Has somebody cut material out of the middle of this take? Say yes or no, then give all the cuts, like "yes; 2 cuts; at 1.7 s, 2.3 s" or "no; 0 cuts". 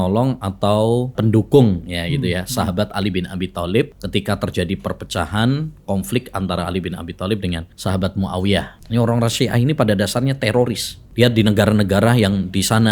yes; 5 cuts; at 1.1 s, 4.0 s, 7.7 s, 8.8 s, 11.0 s